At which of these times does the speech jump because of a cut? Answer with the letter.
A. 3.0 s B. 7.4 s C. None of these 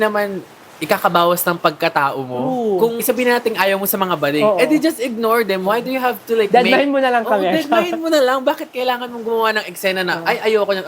A